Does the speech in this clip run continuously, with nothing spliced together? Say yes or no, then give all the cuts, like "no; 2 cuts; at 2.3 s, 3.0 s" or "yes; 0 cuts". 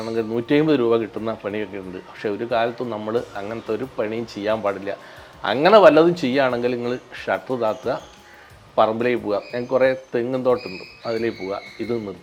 yes; 0 cuts